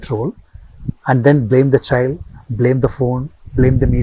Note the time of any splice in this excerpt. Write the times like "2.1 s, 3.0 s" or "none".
none